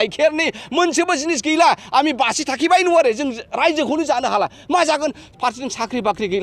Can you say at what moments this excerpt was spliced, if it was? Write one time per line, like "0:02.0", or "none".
none